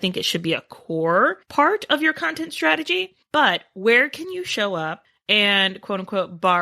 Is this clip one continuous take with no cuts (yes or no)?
no